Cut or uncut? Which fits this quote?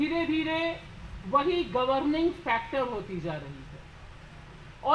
uncut